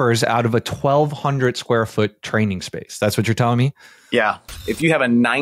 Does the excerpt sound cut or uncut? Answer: cut